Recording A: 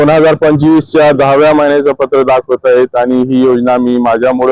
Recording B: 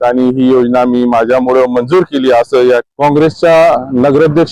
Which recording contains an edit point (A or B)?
B